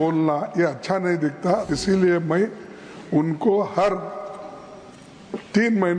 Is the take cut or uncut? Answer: cut